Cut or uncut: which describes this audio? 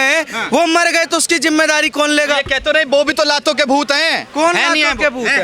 uncut